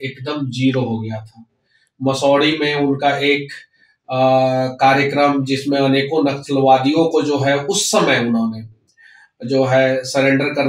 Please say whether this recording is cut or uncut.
uncut